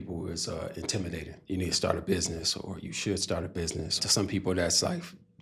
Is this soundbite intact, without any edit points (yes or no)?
no